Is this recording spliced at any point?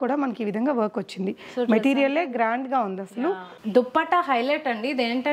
yes; 1 cut; at 3.5 s

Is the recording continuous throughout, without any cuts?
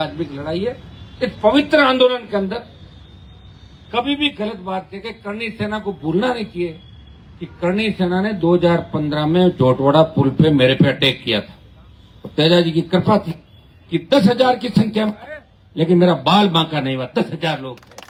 yes; 0 cuts

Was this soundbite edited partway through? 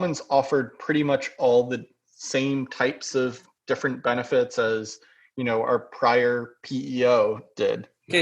no; 0 cuts

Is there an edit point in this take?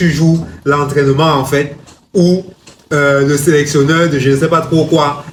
no; 0 cuts

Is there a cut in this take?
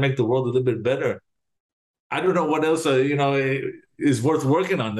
no; 0 cuts

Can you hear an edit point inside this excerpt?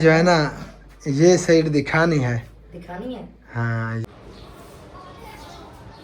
yes; 1 cut; at 4.0 s

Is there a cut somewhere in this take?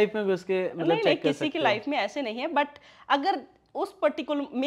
no; 0 cuts

